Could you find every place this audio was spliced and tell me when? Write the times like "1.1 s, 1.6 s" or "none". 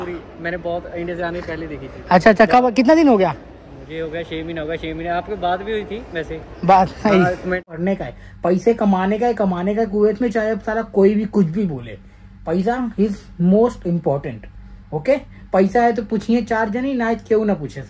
7.7 s